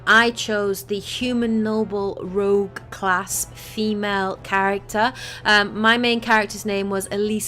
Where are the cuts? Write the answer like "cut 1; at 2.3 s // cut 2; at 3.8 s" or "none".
cut 1; at 3.3 s